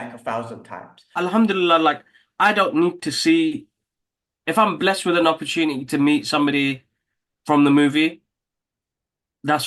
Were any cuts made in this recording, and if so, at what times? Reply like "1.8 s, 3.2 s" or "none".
1.2 s